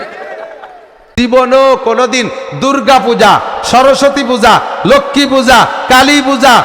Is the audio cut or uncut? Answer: cut